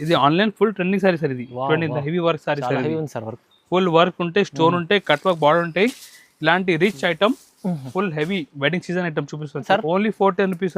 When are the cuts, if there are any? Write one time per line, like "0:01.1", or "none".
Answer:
0:09.7